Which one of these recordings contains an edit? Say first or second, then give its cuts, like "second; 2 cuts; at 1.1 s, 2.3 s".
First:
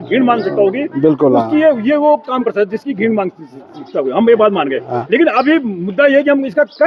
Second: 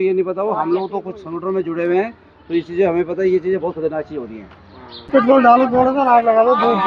second; 1 cut; at 5.1 s